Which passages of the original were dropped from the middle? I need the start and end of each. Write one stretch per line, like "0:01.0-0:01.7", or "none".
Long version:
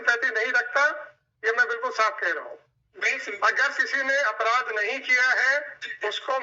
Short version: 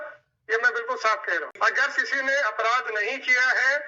0:02.5-0:03.3